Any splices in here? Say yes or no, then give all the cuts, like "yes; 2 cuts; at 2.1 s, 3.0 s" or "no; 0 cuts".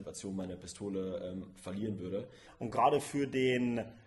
yes; 1 cut; at 2.5 s